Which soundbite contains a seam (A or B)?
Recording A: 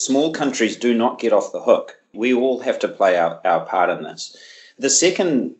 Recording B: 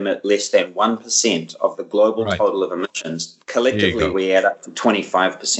A